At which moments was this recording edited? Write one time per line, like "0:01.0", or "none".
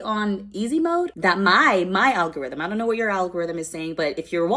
0:01.1